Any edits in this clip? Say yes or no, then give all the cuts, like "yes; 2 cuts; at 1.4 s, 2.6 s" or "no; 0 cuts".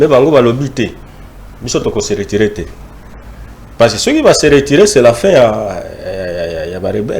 no; 0 cuts